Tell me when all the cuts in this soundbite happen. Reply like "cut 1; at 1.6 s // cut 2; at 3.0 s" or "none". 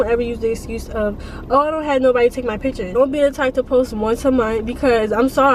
cut 1; at 2.9 s